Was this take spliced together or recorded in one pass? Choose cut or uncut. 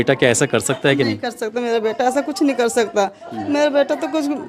uncut